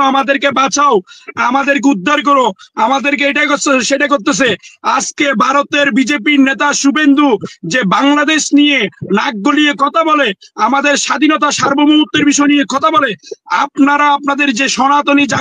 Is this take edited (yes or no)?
no